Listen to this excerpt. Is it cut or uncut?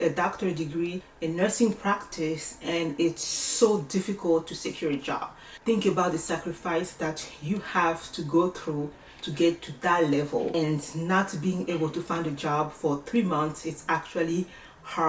cut